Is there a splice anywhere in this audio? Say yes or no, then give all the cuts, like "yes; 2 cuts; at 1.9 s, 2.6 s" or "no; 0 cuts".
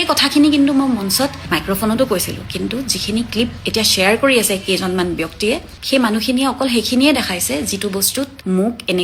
no; 0 cuts